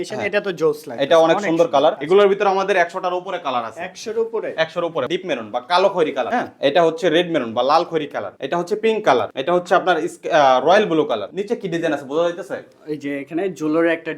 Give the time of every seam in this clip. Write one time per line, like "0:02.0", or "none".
0:02.0
0:05.1
0:11.3